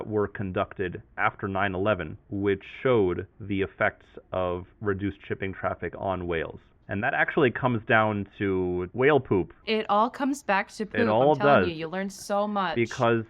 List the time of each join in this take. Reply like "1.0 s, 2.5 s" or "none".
1.0 s, 2.2 s, 3.3 s